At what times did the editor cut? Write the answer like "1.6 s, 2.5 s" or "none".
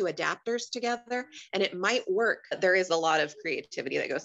2.6 s